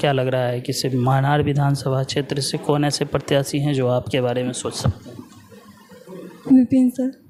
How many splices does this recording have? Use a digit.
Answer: 0